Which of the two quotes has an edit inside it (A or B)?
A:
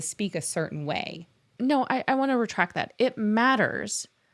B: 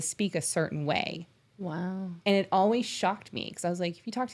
A